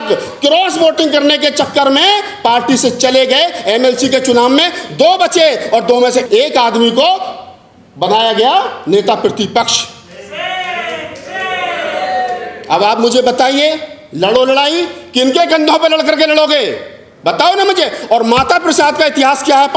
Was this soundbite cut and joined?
no; 0 cuts

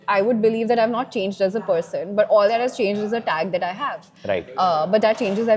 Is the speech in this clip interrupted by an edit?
no; 0 cuts

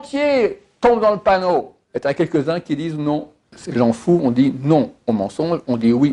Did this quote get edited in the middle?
yes; 2 cuts; at 1.8 s, 3.5 s

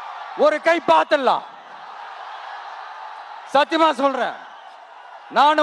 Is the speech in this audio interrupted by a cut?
no; 0 cuts

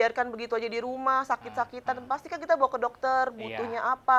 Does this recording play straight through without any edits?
yes; 0 cuts

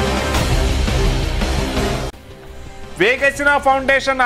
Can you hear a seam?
yes; 1 cut; at 2.2 s

